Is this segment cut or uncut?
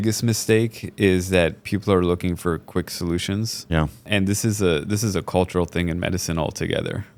uncut